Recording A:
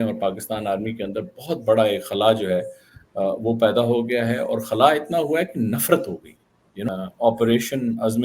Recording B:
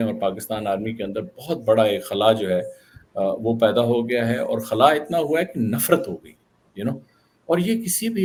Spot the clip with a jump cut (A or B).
A